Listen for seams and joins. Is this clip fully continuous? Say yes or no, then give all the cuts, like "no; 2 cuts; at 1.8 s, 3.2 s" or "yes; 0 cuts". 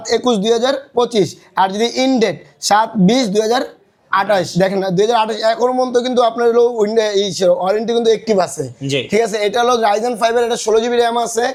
yes; 0 cuts